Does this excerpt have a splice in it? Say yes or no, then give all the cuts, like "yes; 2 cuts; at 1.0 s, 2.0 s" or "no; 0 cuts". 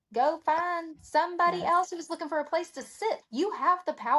no; 0 cuts